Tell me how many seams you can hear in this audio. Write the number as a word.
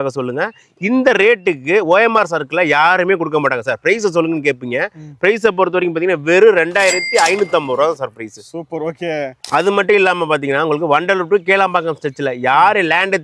zero